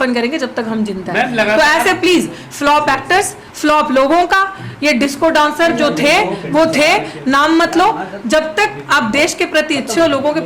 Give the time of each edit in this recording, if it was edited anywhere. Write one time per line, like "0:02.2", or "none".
none